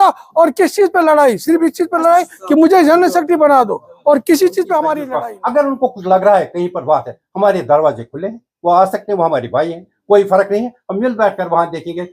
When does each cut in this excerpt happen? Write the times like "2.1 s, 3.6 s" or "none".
5.1 s